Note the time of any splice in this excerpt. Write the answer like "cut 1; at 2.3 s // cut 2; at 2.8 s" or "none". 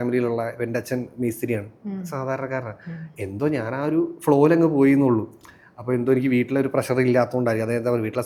none